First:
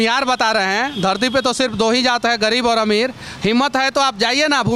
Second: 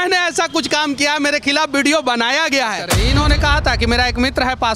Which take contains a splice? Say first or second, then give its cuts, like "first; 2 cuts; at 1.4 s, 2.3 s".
second; 1 cut; at 2.9 s